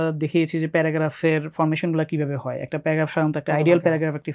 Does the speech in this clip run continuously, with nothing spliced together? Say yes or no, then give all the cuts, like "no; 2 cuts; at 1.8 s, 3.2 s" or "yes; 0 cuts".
yes; 0 cuts